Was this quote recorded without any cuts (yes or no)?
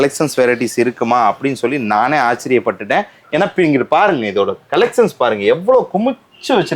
yes